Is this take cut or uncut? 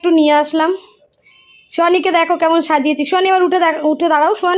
uncut